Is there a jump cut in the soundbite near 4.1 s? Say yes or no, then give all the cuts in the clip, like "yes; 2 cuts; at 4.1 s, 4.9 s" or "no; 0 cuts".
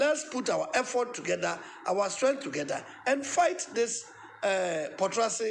no; 0 cuts